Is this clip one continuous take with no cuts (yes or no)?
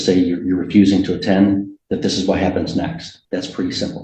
no